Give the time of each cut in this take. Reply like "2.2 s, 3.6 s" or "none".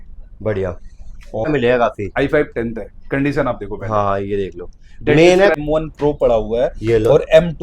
1.5 s, 5.6 s